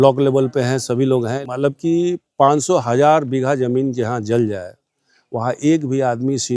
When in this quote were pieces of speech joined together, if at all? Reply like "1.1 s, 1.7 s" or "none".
1.4 s